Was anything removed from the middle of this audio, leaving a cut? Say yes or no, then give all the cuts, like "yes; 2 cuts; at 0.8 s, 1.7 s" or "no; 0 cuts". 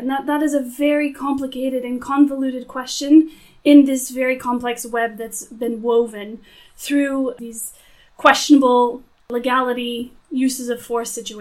yes; 2 cuts; at 7.4 s, 9.2 s